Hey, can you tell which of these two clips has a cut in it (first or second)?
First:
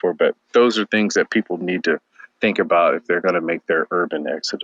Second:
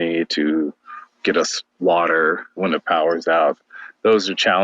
second